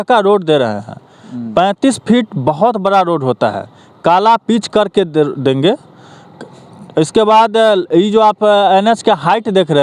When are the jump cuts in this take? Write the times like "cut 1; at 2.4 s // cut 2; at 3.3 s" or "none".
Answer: none